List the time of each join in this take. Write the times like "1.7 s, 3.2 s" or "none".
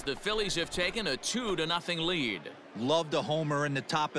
2.6 s

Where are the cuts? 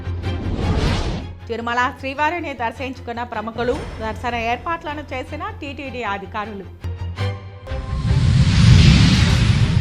1.3 s

